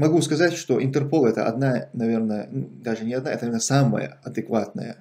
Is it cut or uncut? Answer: uncut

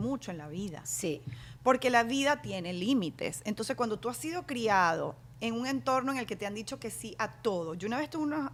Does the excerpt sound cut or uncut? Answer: uncut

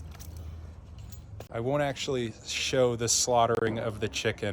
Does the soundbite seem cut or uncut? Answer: cut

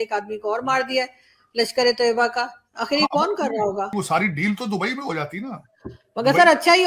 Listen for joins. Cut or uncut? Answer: uncut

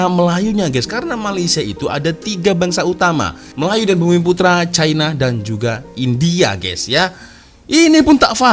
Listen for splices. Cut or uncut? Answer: uncut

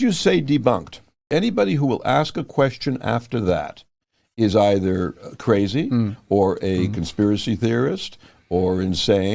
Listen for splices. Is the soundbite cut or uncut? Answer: cut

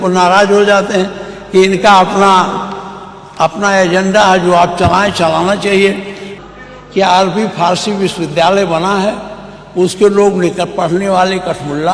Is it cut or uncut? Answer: cut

